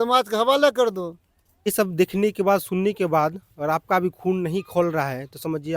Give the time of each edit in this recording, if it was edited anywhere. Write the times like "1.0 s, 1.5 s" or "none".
1.7 s